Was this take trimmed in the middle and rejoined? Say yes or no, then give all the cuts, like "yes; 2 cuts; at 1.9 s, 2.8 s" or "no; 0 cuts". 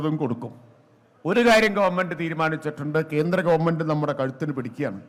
no; 0 cuts